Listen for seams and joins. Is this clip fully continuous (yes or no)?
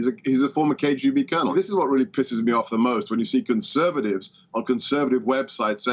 no